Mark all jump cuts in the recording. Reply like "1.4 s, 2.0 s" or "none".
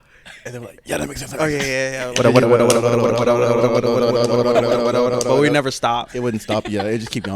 2.0 s